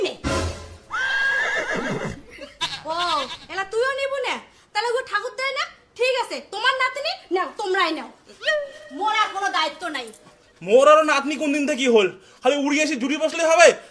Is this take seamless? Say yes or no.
no